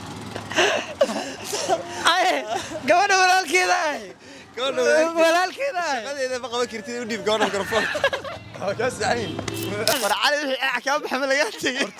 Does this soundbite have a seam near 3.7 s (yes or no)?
no